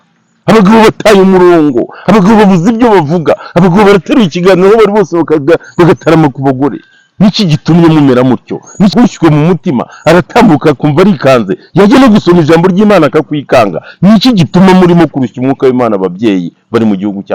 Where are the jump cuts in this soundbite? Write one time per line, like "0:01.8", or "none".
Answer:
0:08.9